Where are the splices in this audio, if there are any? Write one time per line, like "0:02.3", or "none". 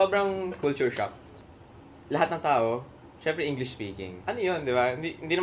0:01.3
0:04.2

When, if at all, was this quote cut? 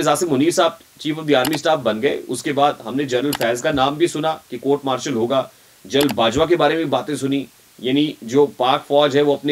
none

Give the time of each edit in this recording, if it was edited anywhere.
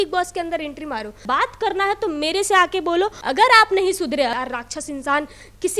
0:01.2
0:03.2
0:04.3

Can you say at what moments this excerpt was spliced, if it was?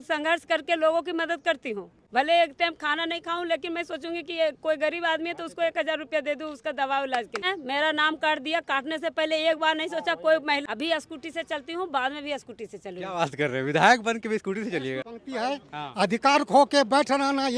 0:01.9
0:07.5
0:10.6
0:15.1

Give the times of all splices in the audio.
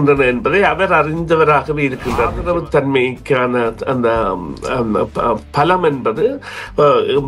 0:02.4

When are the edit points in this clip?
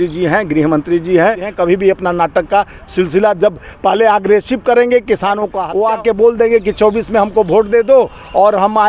0:01.5
0:05.6

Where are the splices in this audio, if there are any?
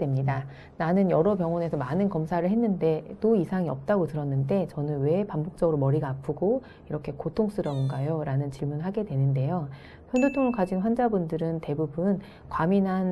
none

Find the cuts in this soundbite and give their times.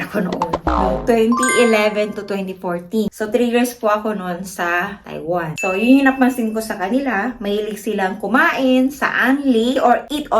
none

